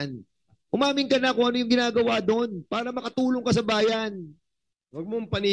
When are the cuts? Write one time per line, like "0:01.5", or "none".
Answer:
none